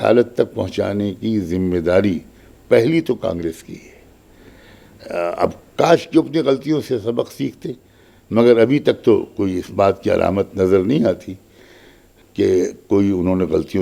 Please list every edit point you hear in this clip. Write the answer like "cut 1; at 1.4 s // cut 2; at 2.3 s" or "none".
none